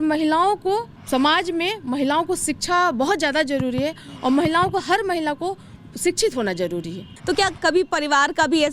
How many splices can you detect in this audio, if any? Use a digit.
2